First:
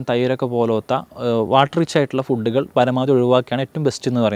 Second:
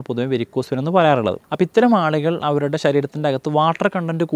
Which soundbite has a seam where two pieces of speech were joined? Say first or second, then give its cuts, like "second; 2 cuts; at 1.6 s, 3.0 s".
second; 1 cut; at 1.4 s